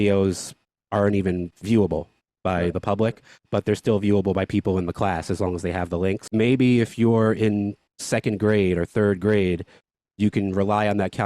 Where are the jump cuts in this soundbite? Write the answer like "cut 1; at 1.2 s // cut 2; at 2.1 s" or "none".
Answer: cut 1; at 6.2 s